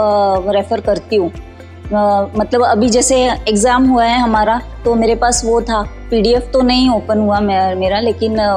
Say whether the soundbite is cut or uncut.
uncut